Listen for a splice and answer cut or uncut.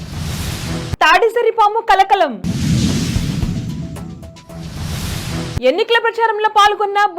cut